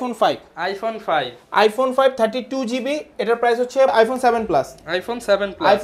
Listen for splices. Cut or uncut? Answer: cut